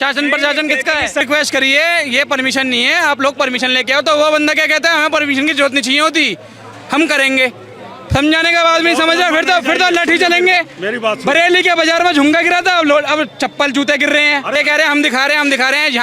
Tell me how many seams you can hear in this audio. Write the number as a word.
two